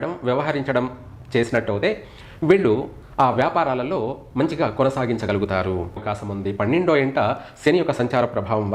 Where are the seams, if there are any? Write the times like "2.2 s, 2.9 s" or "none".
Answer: 6.1 s